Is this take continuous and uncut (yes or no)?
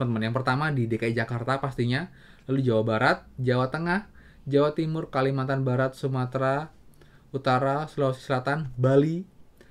yes